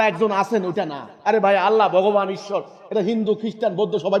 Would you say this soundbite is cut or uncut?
uncut